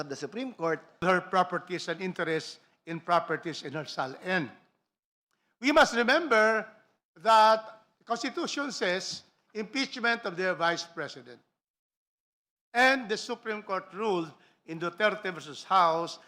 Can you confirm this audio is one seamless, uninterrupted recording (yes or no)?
no